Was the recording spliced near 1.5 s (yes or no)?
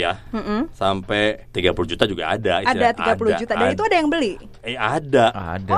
yes